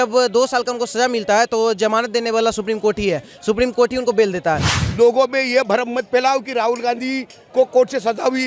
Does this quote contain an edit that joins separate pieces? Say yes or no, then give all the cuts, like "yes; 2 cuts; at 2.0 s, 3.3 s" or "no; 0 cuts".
yes; 1 cut; at 4.7 s